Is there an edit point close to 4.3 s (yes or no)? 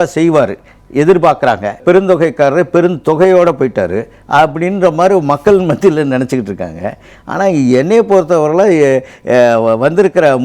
no